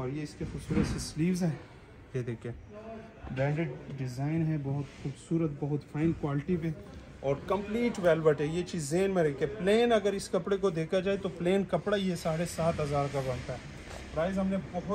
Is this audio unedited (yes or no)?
yes